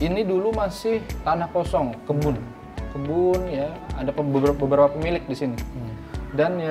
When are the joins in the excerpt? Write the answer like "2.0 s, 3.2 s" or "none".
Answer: 1.1 s